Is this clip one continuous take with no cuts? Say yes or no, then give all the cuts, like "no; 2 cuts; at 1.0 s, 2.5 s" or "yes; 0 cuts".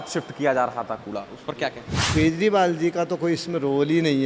no; 1 cut; at 2.1 s